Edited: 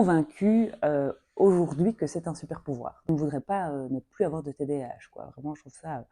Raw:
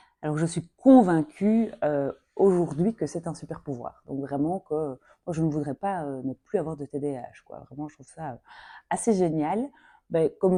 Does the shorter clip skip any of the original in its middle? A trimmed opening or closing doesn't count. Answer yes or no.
yes